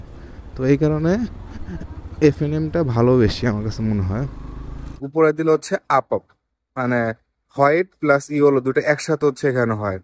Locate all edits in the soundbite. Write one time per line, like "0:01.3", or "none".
0:05.0